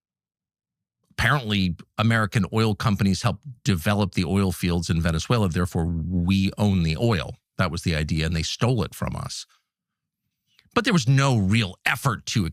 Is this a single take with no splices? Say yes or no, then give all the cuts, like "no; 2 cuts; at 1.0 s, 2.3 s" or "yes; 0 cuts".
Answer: yes; 0 cuts